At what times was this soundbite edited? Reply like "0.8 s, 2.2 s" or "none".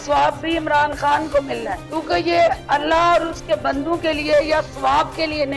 none